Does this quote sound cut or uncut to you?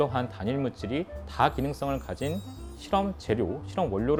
uncut